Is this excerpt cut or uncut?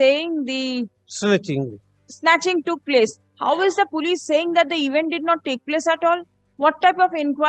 uncut